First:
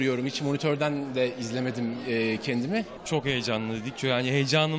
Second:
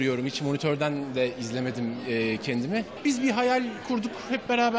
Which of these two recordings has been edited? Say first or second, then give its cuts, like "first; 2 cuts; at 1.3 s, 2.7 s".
first; 1 cut; at 3.0 s